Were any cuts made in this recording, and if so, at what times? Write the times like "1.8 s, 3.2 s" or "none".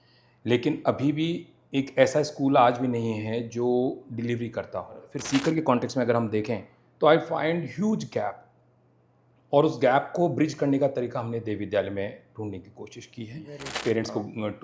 5.1 s, 13.6 s

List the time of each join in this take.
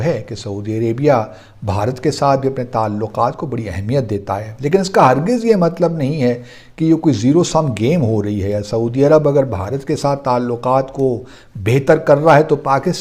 none

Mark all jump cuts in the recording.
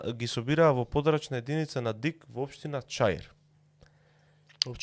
none

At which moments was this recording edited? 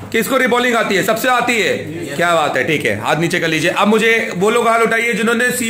none

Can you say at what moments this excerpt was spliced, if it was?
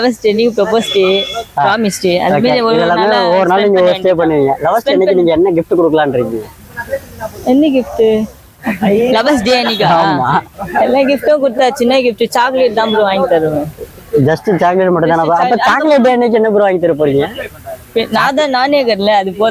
none

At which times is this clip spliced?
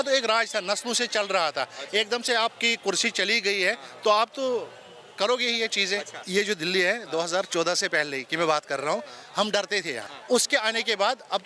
6.2 s, 10.1 s

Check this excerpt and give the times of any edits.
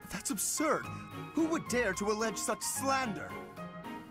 3.2 s

